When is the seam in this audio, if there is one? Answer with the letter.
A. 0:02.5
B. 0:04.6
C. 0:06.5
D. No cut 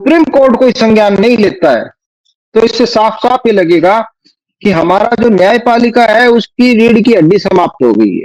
D